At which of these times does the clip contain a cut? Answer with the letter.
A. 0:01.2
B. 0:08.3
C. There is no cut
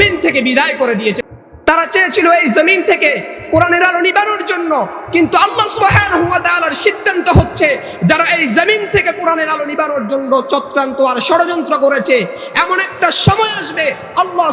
A